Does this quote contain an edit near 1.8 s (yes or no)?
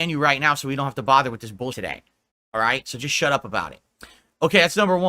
yes